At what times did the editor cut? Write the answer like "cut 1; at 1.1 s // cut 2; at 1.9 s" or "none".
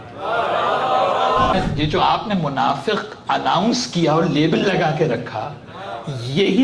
cut 1; at 1.5 s